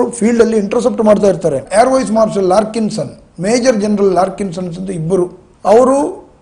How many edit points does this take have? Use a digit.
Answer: 1